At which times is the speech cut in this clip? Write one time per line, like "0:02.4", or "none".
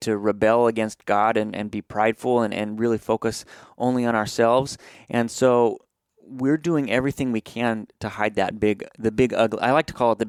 none